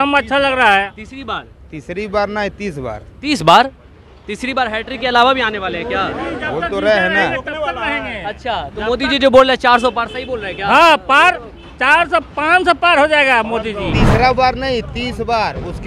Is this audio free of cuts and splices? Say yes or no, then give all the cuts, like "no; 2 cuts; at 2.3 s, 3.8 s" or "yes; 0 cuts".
no; 1 cut; at 13.9 s